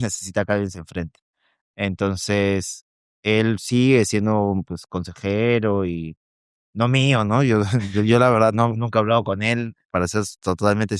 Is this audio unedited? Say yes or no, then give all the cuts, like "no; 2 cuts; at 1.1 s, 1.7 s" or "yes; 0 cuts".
yes; 0 cuts